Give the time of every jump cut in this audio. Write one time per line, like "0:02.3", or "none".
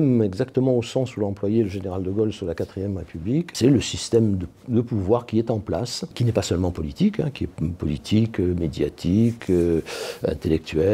0:03.5
0:06.2